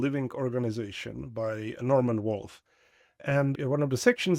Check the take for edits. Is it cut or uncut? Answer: cut